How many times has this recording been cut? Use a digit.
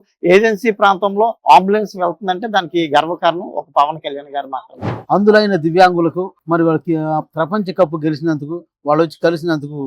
1